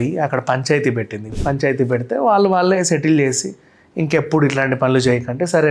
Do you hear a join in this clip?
yes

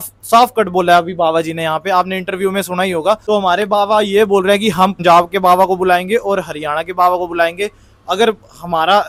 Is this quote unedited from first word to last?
yes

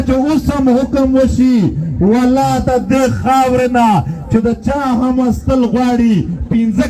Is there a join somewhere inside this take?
no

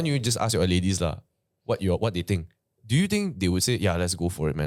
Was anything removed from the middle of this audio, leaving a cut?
no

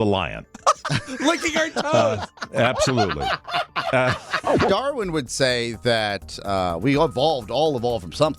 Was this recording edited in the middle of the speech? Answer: yes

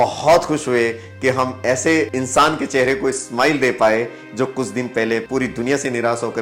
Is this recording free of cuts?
no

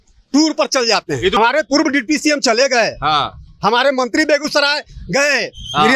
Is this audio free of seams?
no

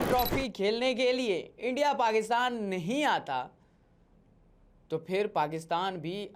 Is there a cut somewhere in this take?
no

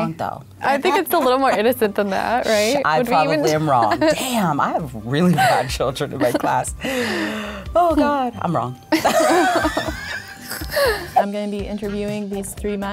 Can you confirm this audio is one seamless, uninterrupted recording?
no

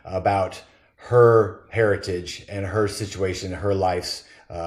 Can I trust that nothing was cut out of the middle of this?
yes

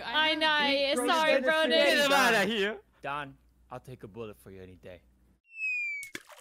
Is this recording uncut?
no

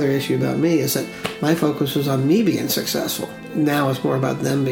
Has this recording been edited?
yes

